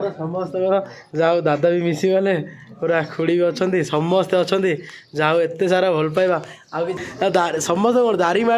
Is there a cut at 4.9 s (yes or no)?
no